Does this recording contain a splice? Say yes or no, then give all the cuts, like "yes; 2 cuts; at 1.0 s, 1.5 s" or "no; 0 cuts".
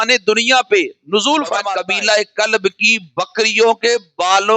yes; 1 cut; at 1.7 s